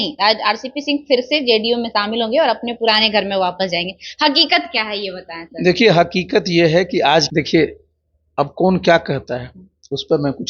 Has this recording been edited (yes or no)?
yes